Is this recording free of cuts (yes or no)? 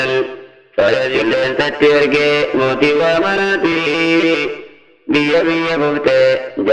no